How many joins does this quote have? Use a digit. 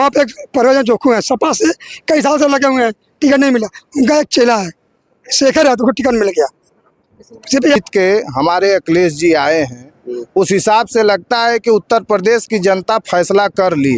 1